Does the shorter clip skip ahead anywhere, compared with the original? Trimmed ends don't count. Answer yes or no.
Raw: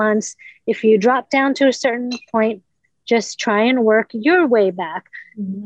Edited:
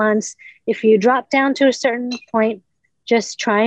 no